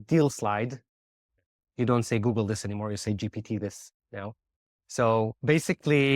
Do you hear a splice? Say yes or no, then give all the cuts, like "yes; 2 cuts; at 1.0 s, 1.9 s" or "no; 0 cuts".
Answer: yes; 2 cuts; at 1.3 s, 5.4 s